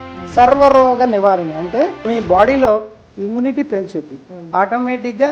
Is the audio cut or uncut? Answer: cut